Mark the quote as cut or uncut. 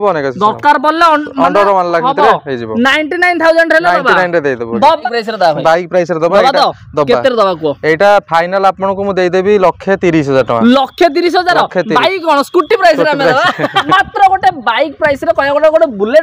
cut